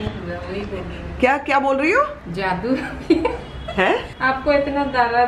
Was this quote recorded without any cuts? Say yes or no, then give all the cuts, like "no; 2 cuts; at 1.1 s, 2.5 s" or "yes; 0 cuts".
yes; 0 cuts